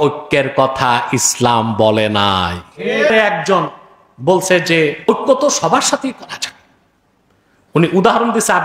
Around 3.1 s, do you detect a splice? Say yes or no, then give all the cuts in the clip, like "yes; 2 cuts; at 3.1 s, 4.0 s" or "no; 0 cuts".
yes; 2 cuts; at 3.1 s, 5.1 s